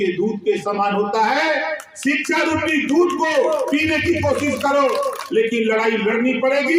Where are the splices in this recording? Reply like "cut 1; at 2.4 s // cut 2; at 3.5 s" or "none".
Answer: cut 1; at 5.2 s